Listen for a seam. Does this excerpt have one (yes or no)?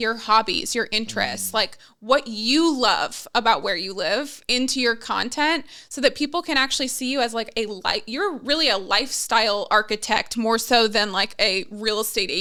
no